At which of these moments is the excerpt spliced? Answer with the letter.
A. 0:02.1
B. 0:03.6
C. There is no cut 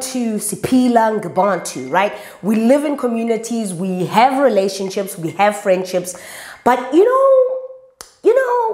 C